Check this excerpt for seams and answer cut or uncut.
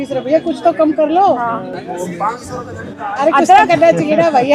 uncut